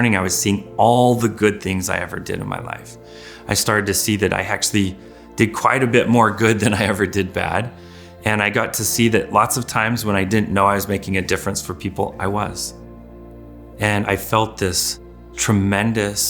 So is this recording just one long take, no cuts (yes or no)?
no